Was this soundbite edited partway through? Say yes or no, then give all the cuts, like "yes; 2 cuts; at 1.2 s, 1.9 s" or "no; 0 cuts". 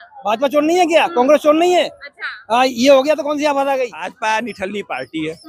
yes; 1 cut; at 4.1 s